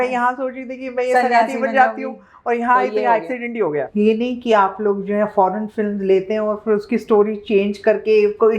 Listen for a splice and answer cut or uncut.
cut